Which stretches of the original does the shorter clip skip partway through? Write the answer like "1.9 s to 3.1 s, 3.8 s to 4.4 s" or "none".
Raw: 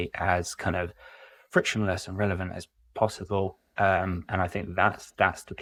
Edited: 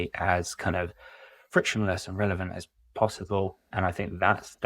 3.6 s to 4.2 s